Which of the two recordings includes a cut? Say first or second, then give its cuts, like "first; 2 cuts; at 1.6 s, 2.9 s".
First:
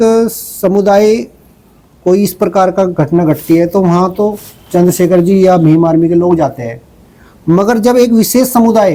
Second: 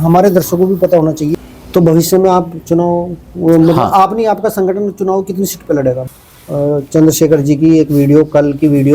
second; 2 cuts; at 1.5 s, 6.0 s